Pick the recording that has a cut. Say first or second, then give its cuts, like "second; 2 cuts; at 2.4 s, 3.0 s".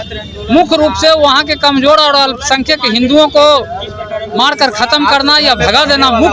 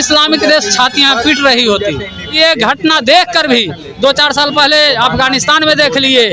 second; 1 cut; at 2.3 s